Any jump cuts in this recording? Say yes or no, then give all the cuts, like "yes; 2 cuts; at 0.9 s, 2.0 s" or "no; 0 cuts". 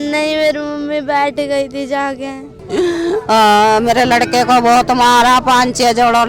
yes; 1 cut; at 2.6 s